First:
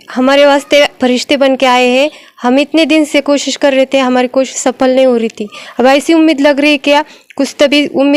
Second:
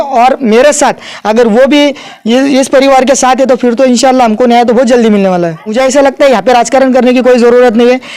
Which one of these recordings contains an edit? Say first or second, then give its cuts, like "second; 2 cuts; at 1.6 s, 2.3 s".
second; 1 cut; at 5.7 s